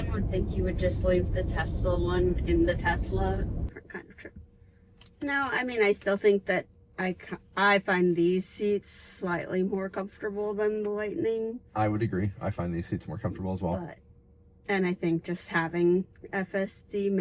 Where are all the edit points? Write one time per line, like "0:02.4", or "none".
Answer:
0:03.7